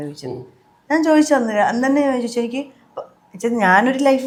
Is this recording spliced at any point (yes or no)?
no